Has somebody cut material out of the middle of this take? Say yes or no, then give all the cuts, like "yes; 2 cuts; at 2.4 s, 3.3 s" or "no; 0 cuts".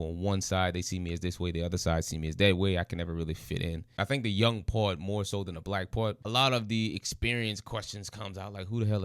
yes; 2 cuts; at 3.8 s, 6.2 s